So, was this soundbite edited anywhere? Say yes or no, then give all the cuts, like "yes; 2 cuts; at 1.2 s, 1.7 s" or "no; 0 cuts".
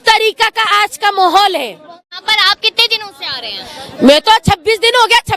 yes; 1 cut; at 2.2 s